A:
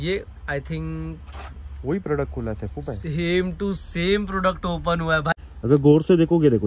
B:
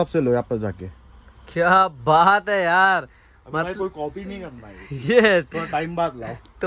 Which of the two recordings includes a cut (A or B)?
A